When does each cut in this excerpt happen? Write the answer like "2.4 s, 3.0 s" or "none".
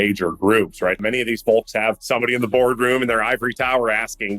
1.0 s, 2.0 s